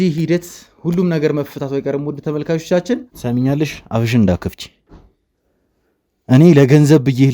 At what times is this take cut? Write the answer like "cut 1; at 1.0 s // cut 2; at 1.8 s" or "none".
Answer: cut 1; at 3.1 s